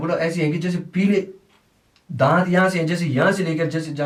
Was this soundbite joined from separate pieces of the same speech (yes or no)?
no